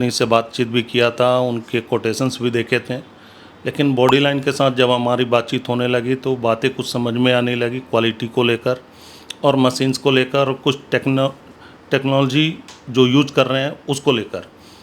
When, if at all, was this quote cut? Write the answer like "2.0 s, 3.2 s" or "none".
none

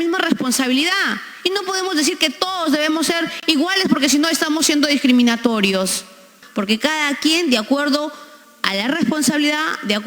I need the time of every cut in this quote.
6.4 s

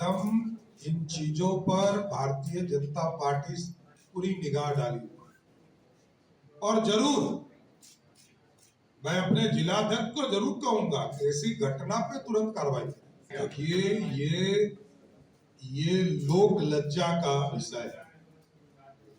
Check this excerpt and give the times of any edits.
13.2 s

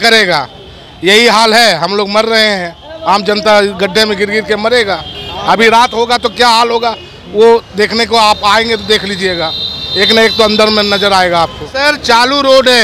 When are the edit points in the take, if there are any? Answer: 11.6 s

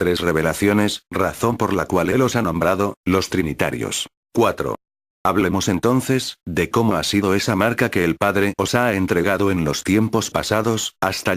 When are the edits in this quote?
none

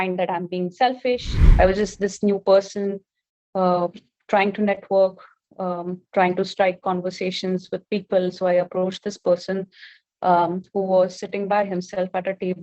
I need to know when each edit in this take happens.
1.5 s

